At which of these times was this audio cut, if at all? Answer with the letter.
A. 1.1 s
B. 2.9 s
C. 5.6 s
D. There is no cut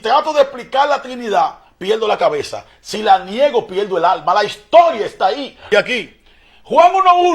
C